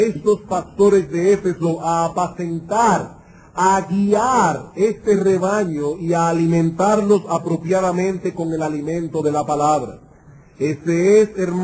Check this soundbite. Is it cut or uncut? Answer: uncut